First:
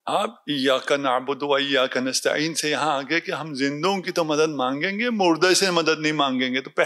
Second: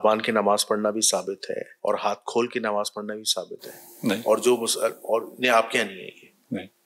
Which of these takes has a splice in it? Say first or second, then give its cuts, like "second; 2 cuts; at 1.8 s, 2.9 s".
second; 1 cut; at 1.7 s